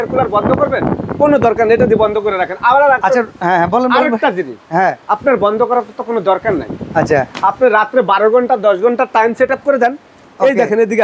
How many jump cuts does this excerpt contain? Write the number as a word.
zero